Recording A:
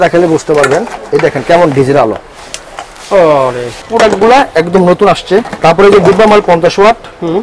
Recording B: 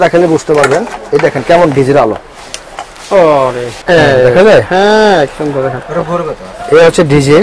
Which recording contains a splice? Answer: A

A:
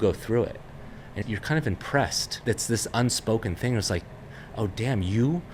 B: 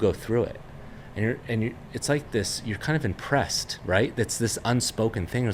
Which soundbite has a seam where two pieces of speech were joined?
A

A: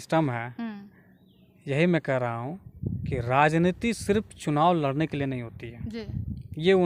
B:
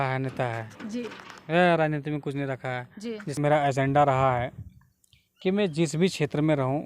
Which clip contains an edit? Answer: B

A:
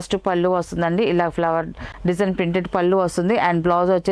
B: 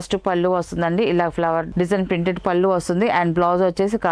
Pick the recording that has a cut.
B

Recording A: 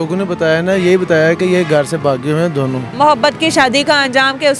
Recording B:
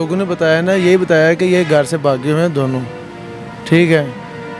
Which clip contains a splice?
A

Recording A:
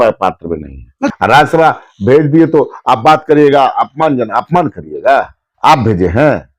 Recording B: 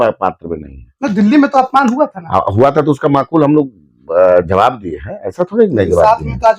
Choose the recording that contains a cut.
A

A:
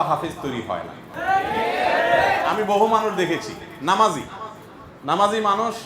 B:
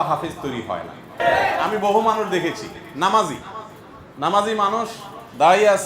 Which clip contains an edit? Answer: B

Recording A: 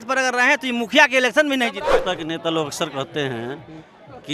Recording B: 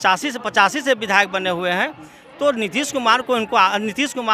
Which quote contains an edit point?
A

